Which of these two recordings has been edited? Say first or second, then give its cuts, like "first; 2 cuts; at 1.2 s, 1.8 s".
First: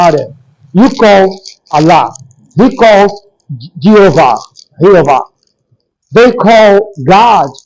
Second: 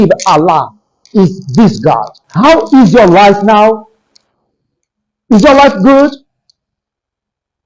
second; 1 cut; at 2.2 s